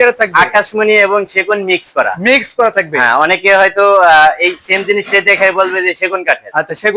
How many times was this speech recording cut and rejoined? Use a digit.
0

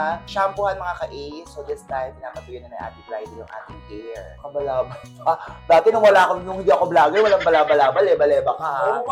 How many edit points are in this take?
0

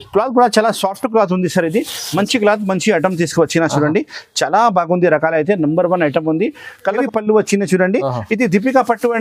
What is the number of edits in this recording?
1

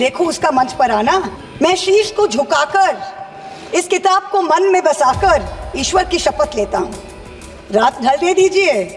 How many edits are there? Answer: 1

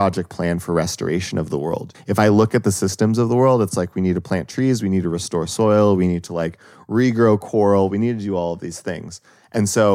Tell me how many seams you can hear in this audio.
1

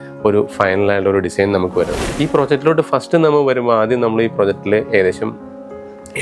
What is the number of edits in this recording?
1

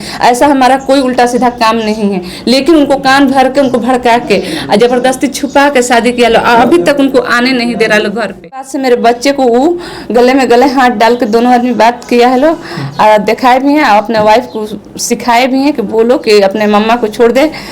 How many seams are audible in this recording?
1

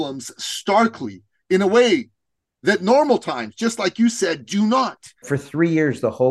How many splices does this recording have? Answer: 1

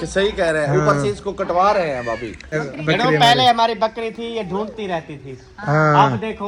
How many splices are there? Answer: 1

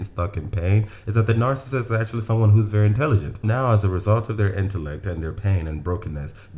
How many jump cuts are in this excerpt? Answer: 1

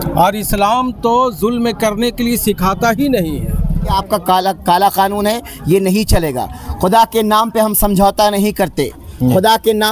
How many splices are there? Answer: 1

